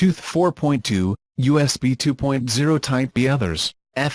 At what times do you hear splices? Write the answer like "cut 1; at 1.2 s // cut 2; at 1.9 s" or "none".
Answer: cut 1; at 3.1 s